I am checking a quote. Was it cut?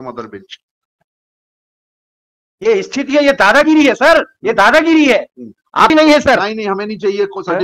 yes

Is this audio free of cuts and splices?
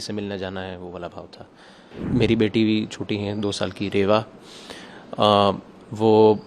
no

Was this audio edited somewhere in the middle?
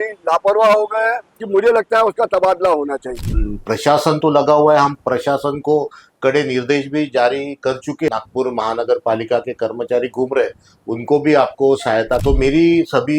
yes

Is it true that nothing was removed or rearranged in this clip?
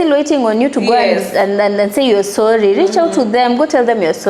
yes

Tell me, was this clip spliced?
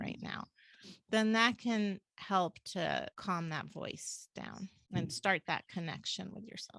yes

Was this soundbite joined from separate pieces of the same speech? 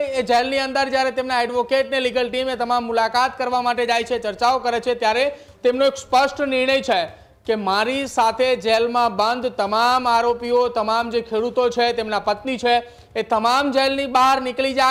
no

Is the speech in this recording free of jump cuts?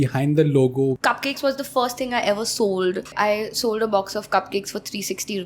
no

